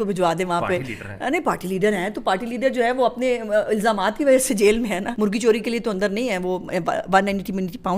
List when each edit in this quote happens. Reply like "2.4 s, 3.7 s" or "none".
none